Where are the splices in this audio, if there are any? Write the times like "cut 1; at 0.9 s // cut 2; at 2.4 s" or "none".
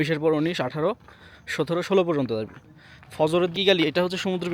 cut 1; at 3.5 s